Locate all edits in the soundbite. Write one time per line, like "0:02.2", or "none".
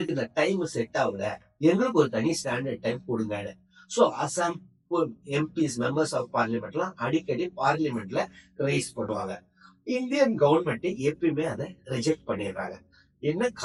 none